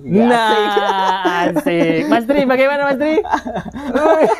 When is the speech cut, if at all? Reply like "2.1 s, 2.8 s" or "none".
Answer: none

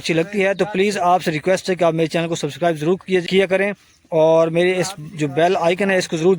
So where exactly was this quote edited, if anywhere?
3.3 s

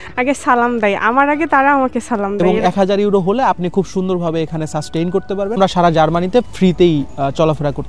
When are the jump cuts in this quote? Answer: 2.4 s, 5.6 s

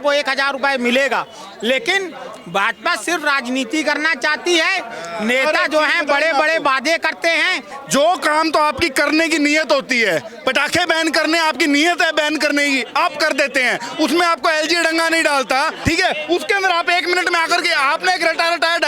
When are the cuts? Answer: 7.8 s, 15.7 s

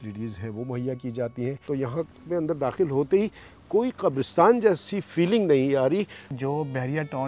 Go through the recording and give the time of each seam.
1.6 s, 6.2 s

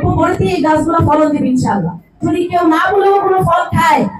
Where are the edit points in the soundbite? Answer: 2.1 s

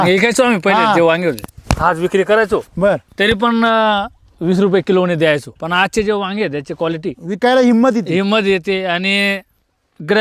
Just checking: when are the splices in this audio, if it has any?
5.6 s

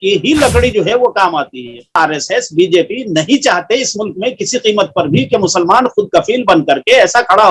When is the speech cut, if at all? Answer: 2.0 s

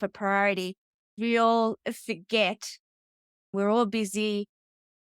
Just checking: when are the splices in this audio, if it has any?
1.1 s, 3.5 s

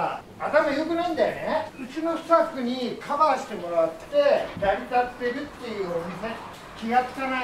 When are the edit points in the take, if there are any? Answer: 1.8 s, 4.5 s, 6.5 s

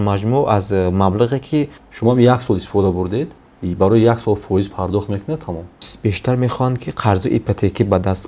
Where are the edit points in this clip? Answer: 1.8 s, 5.9 s

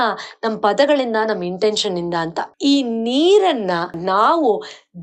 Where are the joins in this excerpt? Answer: 2.5 s, 3.9 s

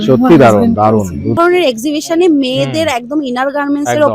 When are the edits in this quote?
1.4 s

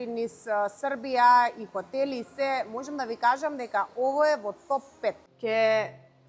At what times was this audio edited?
5.3 s

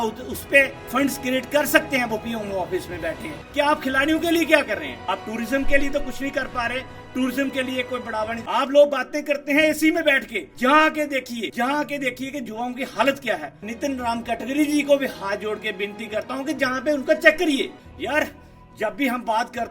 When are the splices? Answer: 3.3 s, 8.4 s, 13.6 s, 17.7 s

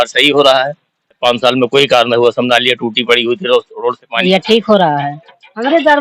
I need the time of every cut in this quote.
1.2 s, 4.2 s

